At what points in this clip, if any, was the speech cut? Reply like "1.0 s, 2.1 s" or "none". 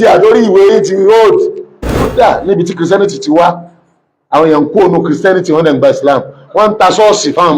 2.1 s